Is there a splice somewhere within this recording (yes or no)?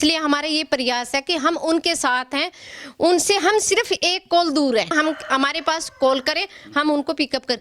yes